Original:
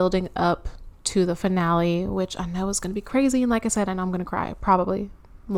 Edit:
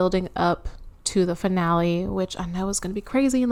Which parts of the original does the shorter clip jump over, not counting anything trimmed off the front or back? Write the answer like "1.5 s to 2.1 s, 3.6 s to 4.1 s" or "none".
none